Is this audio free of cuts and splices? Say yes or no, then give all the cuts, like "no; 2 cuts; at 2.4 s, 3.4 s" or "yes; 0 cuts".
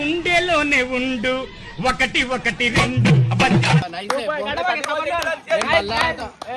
yes; 0 cuts